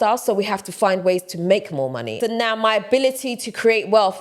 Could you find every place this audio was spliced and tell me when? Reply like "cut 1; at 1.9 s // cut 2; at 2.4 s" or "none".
cut 1; at 2.0 s